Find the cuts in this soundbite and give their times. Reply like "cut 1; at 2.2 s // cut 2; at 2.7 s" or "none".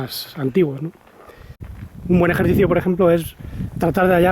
cut 1; at 1.6 s